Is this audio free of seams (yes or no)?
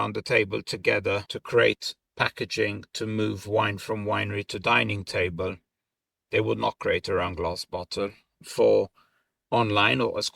no